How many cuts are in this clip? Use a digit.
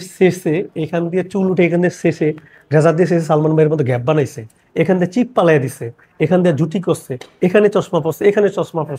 0